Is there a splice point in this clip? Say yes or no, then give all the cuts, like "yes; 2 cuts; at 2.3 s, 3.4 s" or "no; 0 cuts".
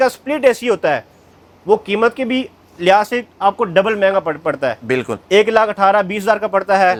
no; 0 cuts